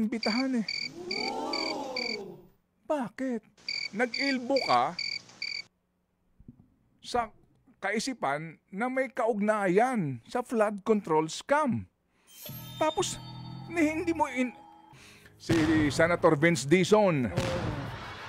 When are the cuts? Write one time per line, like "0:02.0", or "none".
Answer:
0:14.9

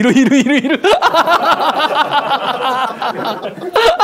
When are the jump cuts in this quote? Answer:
none

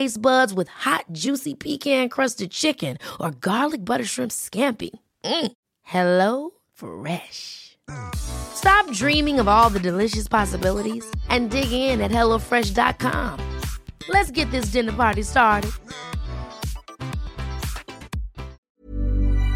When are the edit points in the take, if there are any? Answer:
0:18.6

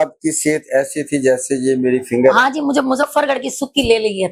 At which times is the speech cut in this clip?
none

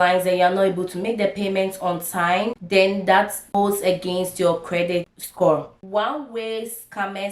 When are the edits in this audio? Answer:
0:02.6
0:03.5
0:05.1
0:05.8

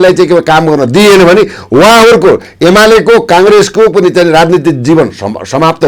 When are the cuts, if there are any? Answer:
none

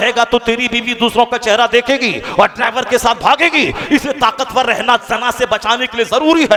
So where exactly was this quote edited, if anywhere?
none

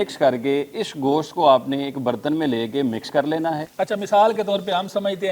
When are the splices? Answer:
0:03.6

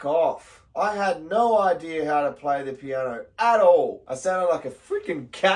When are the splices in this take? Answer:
0:04.0

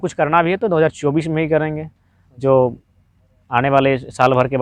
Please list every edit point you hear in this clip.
none

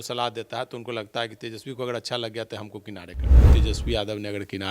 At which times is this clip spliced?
0:03.5

